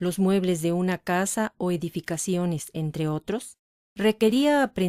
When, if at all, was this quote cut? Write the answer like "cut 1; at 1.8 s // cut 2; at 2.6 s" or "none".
cut 1; at 2.9 s